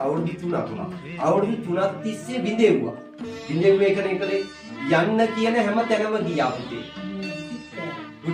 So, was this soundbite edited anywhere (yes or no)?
no